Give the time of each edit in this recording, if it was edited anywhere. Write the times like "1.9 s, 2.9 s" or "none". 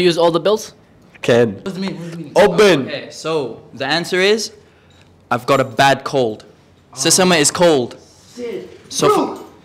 1.6 s